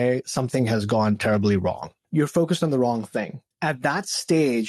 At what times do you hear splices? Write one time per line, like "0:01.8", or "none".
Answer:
0:01.9
0:03.4